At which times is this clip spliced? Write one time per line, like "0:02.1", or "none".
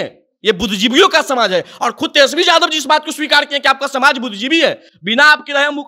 none